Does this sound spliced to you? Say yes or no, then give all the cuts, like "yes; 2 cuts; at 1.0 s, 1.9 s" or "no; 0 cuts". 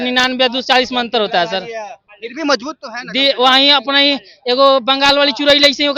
no; 0 cuts